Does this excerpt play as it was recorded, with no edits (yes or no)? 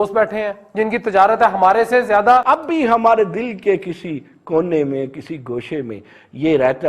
no